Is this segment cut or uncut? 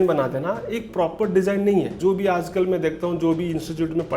cut